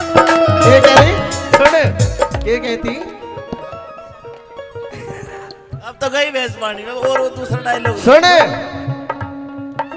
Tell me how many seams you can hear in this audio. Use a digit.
0